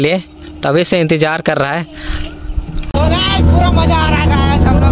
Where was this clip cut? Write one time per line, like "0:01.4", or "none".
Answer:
0:02.8